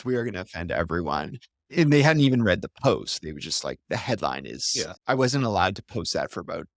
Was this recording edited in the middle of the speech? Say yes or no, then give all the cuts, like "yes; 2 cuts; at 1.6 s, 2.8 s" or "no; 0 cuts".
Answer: no; 0 cuts